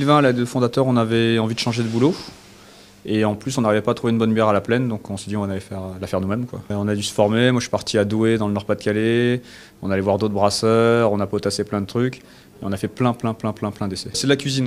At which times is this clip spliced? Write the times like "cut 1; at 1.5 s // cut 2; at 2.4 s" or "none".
cut 1; at 11.0 s

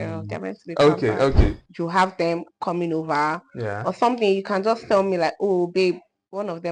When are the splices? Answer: cut 1; at 1.6 s

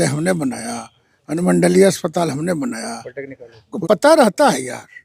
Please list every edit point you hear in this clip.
cut 1; at 3.7 s

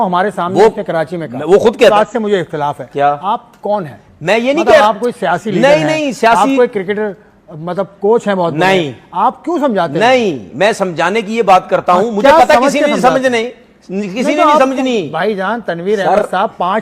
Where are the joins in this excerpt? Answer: cut 1; at 1.9 s

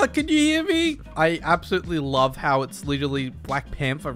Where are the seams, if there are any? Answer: none

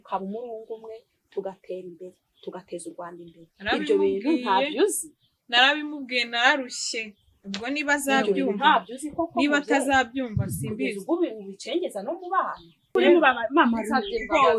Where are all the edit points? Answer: cut 1; at 12.9 s

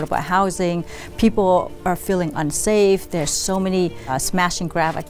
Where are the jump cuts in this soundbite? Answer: cut 1; at 4.1 s

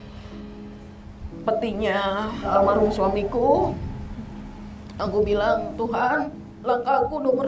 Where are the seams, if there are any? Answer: cut 1; at 2.5 s

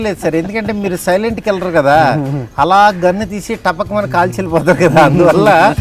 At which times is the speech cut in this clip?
none

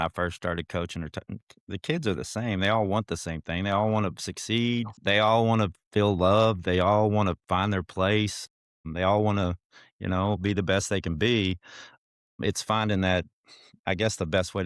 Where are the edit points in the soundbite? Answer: cut 1; at 5.0 s // cut 2; at 5.8 s

